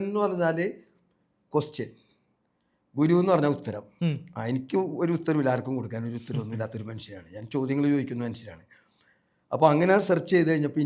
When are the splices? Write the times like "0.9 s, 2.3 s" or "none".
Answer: none